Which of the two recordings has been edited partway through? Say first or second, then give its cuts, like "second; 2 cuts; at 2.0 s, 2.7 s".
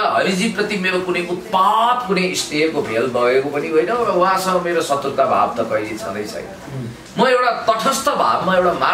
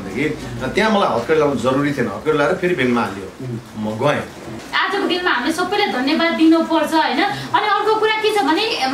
second; 1 cut; at 4.6 s